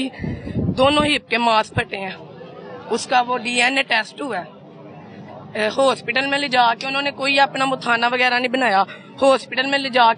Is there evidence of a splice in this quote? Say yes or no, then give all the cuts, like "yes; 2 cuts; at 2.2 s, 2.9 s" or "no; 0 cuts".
no; 0 cuts